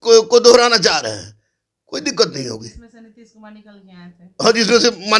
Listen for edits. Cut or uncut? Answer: uncut